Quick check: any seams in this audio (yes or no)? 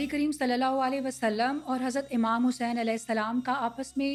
no